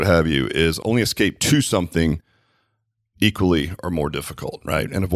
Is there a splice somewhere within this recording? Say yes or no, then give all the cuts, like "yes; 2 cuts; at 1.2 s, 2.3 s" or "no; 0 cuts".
no; 0 cuts